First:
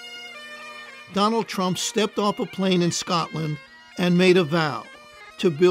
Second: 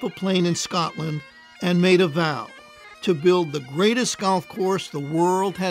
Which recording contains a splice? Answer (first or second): first